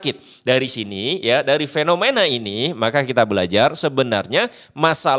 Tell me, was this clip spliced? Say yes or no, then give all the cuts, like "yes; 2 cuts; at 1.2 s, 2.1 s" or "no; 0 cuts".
no; 0 cuts